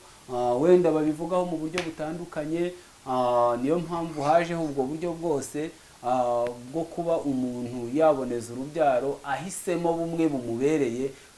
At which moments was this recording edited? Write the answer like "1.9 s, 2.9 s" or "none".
none